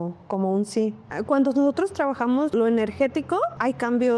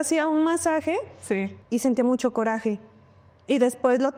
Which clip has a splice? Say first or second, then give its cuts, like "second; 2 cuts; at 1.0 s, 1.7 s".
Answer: first; 2 cuts; at 1.1 s, 2.5 s